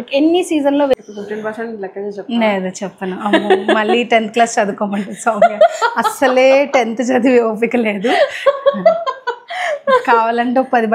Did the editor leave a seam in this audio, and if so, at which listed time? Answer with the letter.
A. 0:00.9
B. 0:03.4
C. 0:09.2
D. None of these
A